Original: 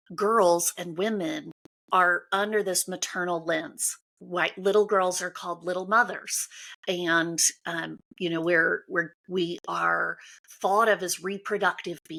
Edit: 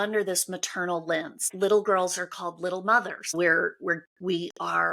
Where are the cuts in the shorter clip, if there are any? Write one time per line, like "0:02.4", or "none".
0:01.5
0:03.3